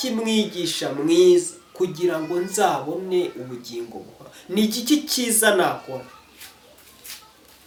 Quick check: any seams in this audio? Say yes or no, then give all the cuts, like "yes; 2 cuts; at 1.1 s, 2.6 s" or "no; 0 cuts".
no; 0 cuts